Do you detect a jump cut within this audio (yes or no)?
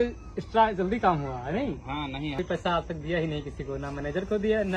yes